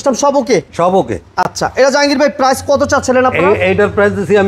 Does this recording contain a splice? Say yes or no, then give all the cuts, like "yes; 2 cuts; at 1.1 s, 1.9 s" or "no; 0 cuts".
no; 0 cuts